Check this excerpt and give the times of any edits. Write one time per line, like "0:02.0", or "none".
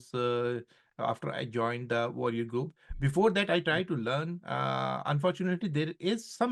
none